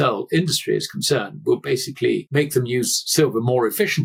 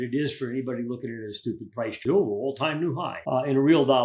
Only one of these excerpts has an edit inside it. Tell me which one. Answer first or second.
second